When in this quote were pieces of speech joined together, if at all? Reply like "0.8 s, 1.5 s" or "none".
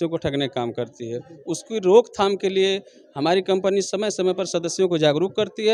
none